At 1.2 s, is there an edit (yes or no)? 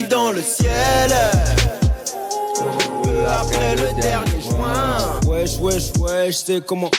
no